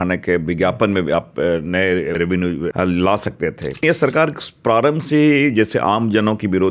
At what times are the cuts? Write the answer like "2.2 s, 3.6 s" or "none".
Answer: 2.3 s, 3.8 s